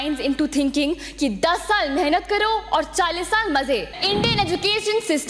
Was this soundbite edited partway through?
yes; 1 cut; at 4.0 s

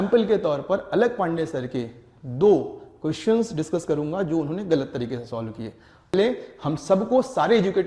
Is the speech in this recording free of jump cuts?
no; 1 cut; at 6.1 s

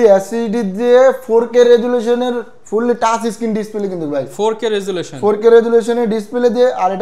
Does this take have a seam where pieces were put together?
no; 0 cuts

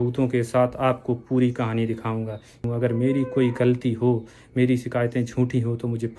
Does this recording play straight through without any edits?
no; 1 cut; at 2.6 s

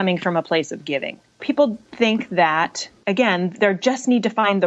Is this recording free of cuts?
no; 1 cut; at 1.4 s

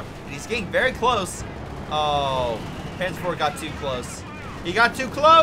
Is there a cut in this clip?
no; 0 cuts

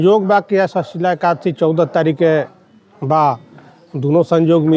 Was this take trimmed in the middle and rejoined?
no; 0 cuts

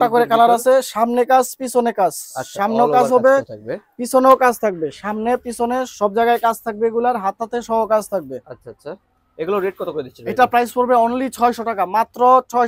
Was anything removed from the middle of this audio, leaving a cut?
no; 0 cuts

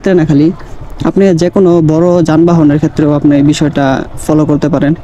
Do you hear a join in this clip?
no; 0 cuts

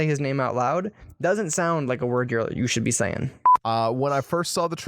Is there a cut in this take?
yes; 1 cut; at 3.6 s

